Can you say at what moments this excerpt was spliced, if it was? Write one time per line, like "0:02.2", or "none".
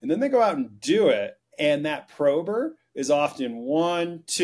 0:01.4